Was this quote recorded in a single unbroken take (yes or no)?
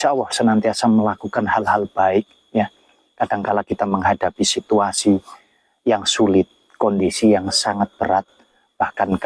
yes